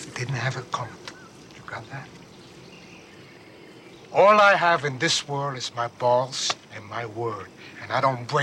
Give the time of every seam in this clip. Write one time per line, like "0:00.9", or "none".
none